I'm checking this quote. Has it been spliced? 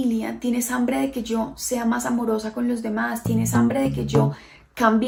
no; 0 cuts

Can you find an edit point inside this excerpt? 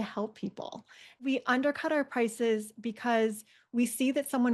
yes; 1 cut; at 1.2 s

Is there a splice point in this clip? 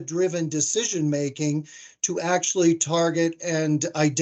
no; 0 cuts

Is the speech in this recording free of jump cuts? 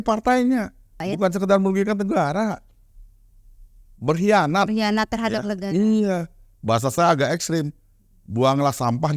no; 1 cut; at 1.0 s

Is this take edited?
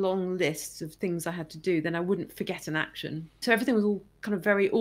yes; 1 cut; at 3.4 s

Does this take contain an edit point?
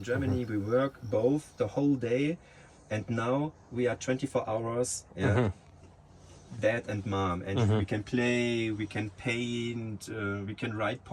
no; 0 cuts

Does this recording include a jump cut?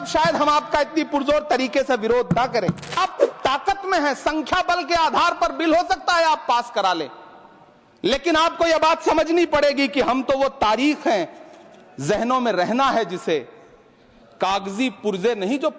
yes; 1 cut; at 3.0 s

